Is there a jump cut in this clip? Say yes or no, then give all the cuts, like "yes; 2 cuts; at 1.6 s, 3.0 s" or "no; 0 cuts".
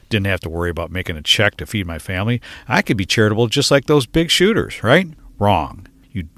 yes; 1 cut; at 5.2 s